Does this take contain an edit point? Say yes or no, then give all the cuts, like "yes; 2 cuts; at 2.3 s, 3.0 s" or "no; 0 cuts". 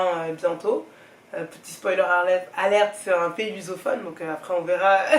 no; 0 cuts